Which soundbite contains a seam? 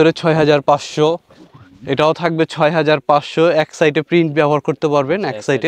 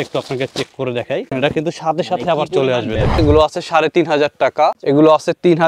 second; 3 cuts; at 1.3 s, 3.2 s, 4.8 s

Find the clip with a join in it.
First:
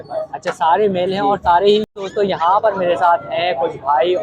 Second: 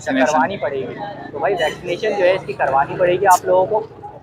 first; 1 cut; at 1.9 s

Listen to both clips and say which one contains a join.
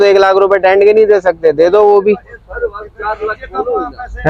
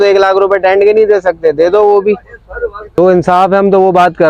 second; 1 cut; at 3.0 s

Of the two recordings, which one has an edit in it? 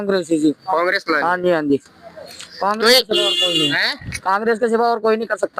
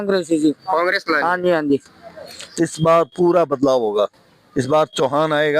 second; 1 cut; at 2.4 s

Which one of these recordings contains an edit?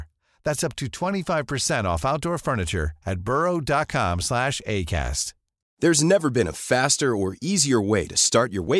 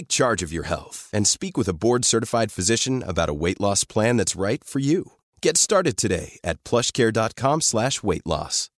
first; 1 cut; at 5.6 s

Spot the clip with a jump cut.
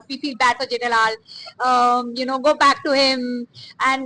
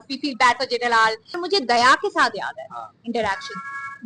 second; 1 cut; at 1.4 s

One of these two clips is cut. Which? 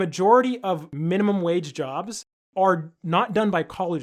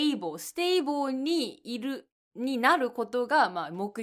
first; 2 cuts; at 0.9 s, 2.3 s

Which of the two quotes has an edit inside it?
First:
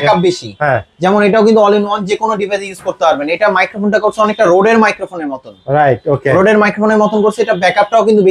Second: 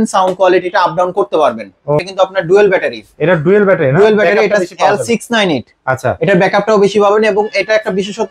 second; 1 cut; at 2.0 s

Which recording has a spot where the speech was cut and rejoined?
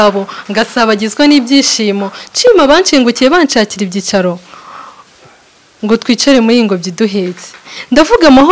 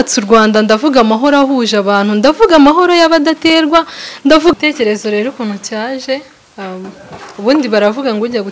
second; 1 cut; at 4.5 s

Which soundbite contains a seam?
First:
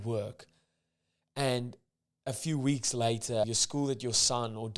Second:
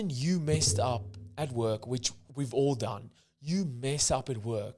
first; 1 cut; at 3.4 s

